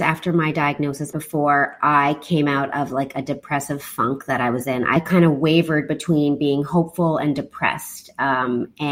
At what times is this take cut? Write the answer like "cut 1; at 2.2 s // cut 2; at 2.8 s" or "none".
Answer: cut 1; at 1.1 s // cut 2; at 5.0 s

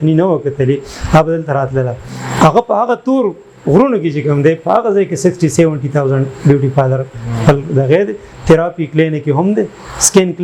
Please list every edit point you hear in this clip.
none

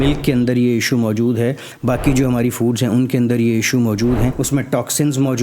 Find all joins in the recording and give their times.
cut 1; at 4.4 s

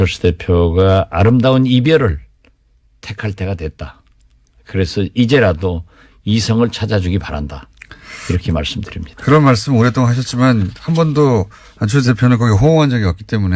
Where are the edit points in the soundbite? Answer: cut 1; at 10.3 s

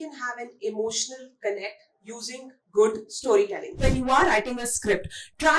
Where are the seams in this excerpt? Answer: cut 1; at 3.7 s

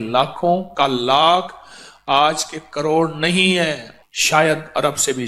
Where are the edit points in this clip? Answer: cut 1; at 3.9 s

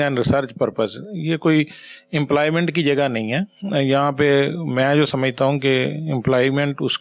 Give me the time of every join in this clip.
none

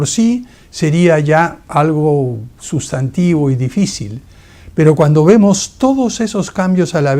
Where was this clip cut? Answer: cut 1; at 4.0 s

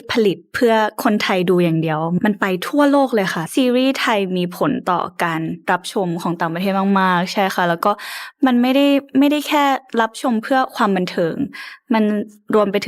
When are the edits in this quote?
cut 1; at 2.2 s // cut 2; at 3.4 s

